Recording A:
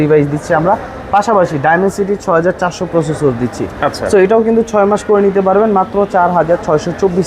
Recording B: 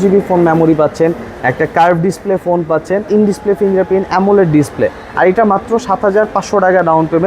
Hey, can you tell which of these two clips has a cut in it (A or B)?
B